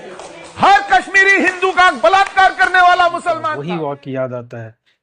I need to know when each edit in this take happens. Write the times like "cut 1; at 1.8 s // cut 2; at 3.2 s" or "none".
cut 1; at 3.5 s